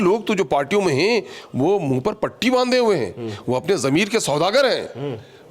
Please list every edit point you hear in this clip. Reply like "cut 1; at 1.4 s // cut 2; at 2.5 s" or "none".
none